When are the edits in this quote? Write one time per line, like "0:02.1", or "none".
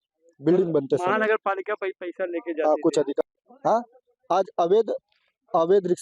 0:03.2